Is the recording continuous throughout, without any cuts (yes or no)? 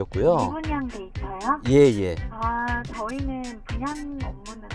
yes